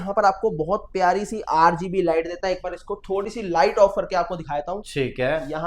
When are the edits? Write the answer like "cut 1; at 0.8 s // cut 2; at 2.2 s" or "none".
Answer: none